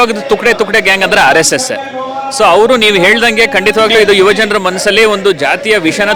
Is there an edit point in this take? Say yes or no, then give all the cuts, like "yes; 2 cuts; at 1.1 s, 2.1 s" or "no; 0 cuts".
no; 0 cuts